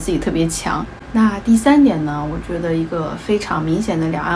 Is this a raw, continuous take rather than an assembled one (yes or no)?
no